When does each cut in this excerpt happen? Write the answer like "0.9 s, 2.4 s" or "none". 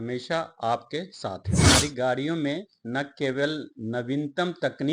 1.7 s